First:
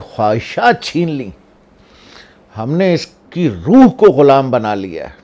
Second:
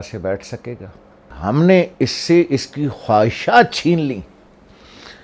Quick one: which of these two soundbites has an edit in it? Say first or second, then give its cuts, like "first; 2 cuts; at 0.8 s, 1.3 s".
second; 1 cut; at 1.3 s